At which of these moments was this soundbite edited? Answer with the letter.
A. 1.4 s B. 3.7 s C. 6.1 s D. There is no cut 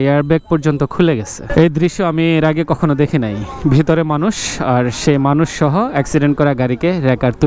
A